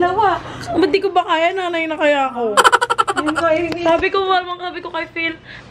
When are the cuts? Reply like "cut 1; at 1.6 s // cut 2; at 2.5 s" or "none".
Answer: none